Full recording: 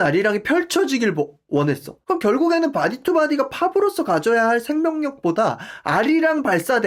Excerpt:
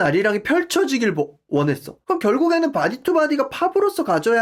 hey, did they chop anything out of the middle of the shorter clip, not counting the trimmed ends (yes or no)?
no